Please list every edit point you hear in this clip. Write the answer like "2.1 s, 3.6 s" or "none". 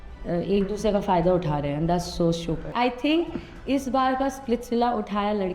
2.7 s